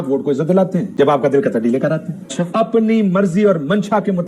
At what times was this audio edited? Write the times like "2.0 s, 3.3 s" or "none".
2.2 s